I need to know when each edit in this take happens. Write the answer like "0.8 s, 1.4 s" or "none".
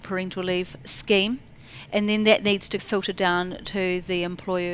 none